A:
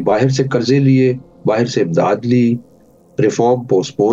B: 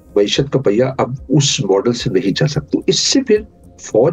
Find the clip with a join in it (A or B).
B